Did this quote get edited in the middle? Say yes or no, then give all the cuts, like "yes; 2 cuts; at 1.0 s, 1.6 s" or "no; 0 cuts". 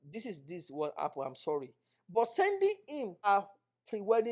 yes; 1 cut; at 3.3 s